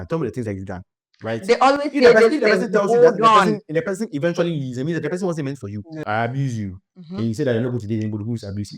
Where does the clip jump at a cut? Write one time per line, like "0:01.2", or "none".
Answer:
0:06.0